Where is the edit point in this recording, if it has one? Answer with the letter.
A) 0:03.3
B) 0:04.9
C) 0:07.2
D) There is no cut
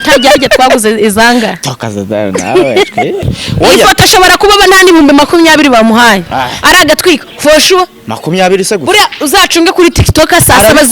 A